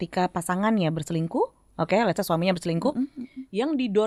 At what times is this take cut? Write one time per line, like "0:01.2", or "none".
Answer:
none